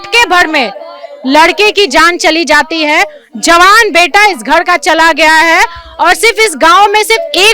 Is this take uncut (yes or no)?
yes